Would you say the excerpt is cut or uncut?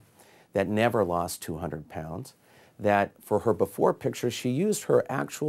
uncut